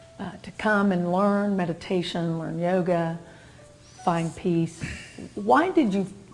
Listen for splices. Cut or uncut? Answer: uncut